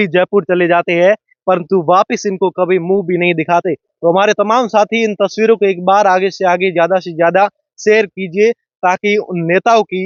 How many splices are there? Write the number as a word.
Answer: zero